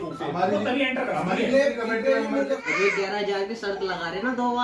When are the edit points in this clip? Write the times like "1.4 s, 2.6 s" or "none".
2.6 s